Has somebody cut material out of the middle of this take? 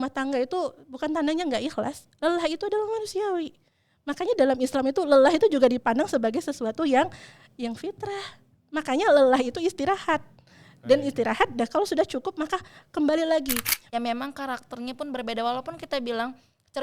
yes; 1 cut; at 13.7 s

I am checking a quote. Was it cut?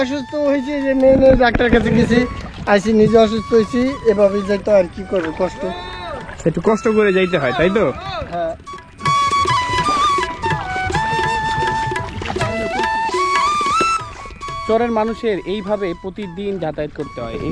no; 0 cuts

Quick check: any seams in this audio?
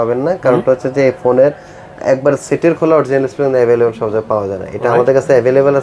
no; 0 cuts

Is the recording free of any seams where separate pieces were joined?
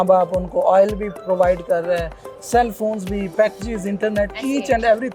yes; 0 cuts

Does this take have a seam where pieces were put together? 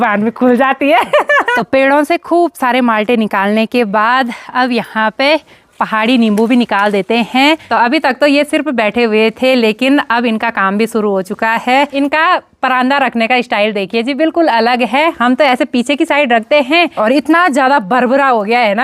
yes; 4 cuts; at 1.5 s, 7.6 s, 11.9 s, 16.9 s

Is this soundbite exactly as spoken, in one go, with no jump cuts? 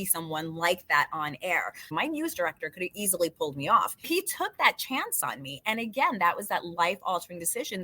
no; 2 cuts; at 1.9 s, 4.1 s

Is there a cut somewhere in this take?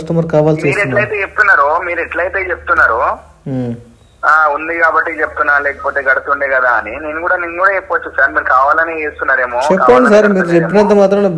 no; 0 cuts

